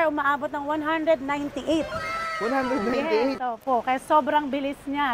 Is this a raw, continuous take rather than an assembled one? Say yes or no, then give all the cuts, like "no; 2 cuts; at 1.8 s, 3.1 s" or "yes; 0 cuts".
yes; 0 cuts